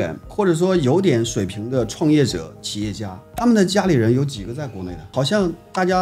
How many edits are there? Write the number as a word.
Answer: one